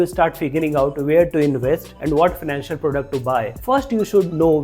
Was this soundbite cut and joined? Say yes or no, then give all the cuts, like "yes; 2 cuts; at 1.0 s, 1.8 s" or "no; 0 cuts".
yes; 2 cuts; at 1.9 s, 3.6 s